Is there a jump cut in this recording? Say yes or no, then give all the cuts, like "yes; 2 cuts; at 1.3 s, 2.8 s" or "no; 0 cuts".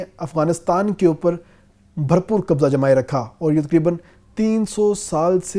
no; 0 cuts